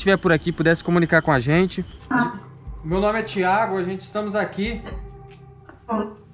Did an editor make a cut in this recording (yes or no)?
yes